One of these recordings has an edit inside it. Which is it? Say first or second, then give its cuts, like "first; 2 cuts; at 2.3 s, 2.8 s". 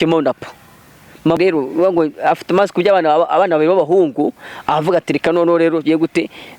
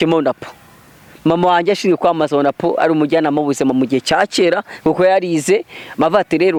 first; 1 cut; at 1.4 s